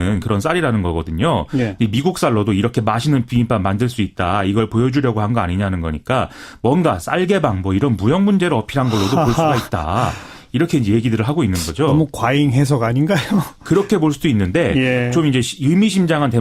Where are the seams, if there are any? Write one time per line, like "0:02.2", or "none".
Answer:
0:03.9